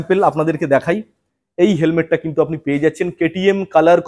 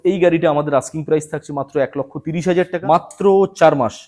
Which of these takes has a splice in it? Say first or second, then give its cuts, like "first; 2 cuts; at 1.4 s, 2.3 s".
second; 1 cut; at 2.8 s